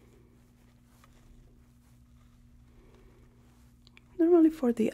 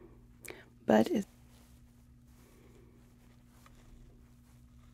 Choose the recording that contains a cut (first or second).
second